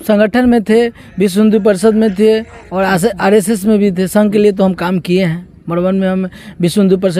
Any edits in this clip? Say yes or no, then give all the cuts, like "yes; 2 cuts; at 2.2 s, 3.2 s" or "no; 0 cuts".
no; 0 cuts